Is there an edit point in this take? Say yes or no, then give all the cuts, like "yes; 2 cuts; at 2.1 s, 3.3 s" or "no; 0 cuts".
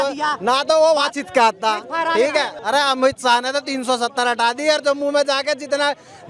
no; 0 cuts